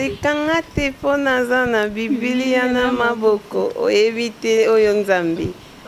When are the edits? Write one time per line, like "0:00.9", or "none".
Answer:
none